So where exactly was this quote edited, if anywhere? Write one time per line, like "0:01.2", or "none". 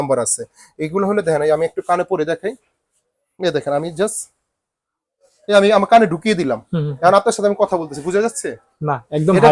none

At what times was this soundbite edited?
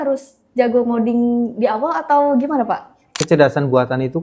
0:03.1

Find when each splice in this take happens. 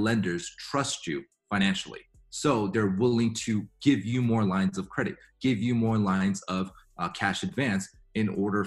none

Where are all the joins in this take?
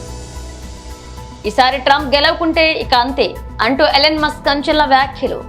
none

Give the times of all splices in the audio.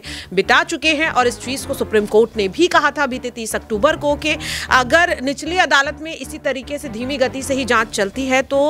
none

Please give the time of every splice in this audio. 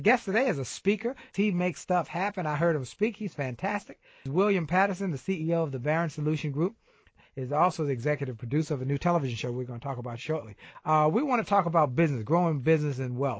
0:01.3
0:04.2
0:07.0
0:10.7

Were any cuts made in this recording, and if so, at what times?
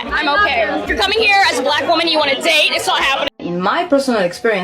0:03.3

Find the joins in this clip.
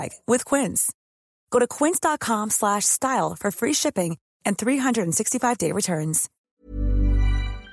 0:06.3

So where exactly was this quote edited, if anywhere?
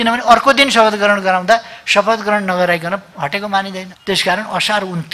0:03.9

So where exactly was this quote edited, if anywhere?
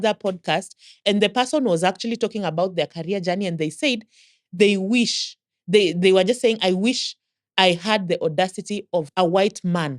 0:01.0
0:09.1

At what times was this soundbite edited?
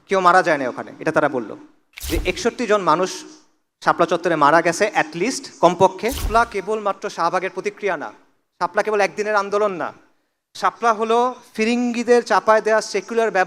0:01.9
0:06.2

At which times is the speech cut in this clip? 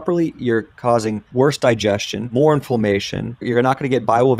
0:01.2
0:02.2
0:03.4

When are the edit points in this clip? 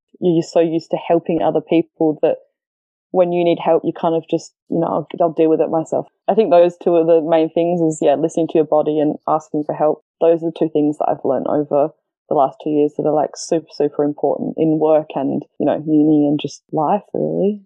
0:04.6
0:06.0
0:10.0
0:15.5
0:16.6

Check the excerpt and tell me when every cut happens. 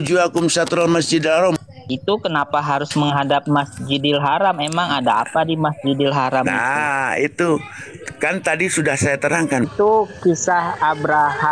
0:01.6
0:09.6

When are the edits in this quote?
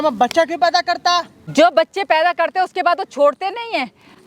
0:01.4

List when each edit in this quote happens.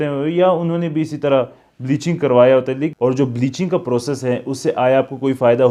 0:02.9

